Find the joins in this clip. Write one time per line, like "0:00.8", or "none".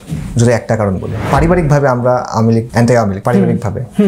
0:01.2
0:02.9